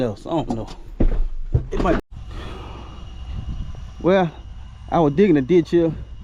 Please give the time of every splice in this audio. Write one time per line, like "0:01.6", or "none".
0:02.0

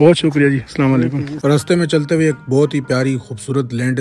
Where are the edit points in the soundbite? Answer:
0:01.3

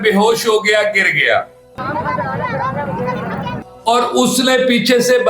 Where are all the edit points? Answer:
0:03.5

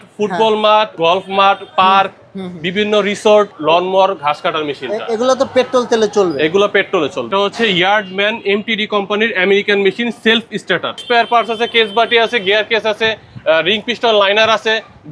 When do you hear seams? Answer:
0:00.9
0:03.5
0:07.2
0:11.0

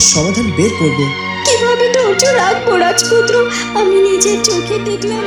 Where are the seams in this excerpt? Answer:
none

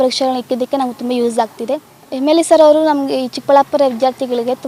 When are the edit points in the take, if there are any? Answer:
0:02.0

